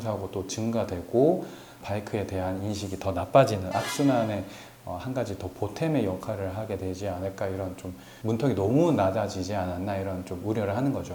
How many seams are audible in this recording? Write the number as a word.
one